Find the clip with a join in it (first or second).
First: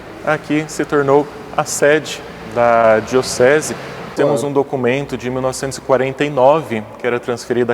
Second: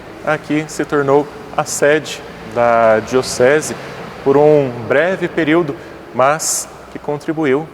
first